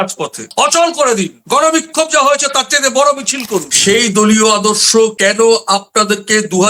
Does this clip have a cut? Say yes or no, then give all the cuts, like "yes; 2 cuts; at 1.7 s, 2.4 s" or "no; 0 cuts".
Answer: yes; 1 cut; at 3.7 s